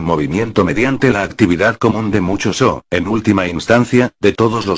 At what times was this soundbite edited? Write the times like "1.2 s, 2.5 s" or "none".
3.2 s

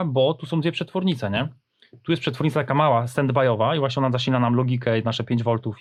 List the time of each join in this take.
none

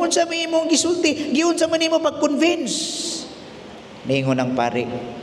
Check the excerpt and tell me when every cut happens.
none

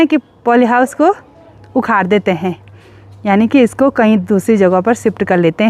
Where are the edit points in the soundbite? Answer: none

